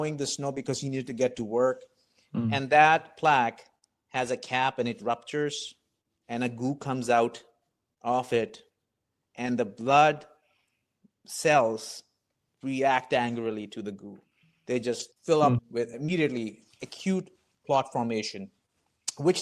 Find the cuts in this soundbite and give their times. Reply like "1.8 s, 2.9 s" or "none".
none